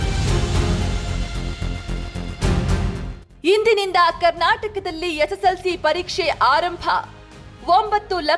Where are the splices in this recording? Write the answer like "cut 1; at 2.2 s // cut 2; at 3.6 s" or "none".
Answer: none